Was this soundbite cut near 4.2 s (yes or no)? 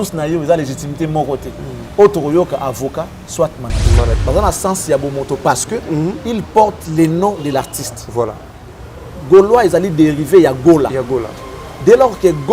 yes